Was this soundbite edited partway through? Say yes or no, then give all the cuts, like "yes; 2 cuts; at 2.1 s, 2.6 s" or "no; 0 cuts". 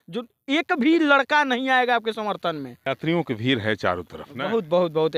yes; 1 cut; at 2.8 s